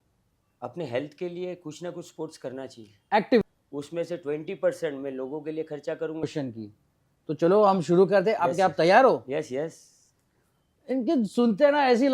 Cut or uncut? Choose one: cut